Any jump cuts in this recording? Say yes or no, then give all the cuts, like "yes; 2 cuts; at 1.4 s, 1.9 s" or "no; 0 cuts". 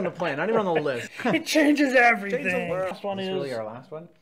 yes; 2 cuts; at 1.1 s, 3.0 s